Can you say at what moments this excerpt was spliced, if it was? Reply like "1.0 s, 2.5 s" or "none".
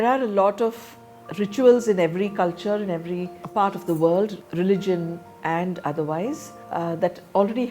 3.4 s, 6.5 s